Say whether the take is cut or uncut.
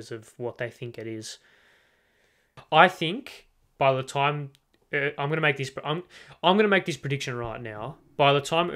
cut